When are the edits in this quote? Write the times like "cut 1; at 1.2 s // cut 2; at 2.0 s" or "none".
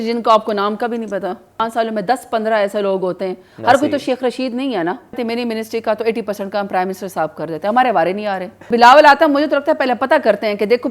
cut 1; at 1.6 s // cut 2; at 5.2 s // cut 3; at 8.7 s